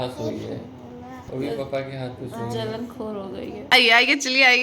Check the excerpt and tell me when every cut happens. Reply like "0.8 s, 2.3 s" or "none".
3.7 s